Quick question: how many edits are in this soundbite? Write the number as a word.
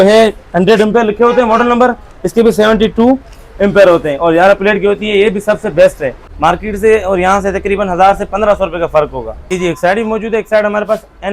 two